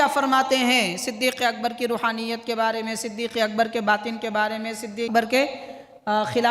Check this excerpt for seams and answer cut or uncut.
cut